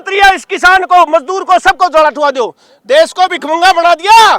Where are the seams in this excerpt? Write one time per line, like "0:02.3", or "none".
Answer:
0:03.4